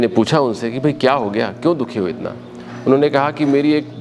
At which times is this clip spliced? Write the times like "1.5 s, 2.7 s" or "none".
none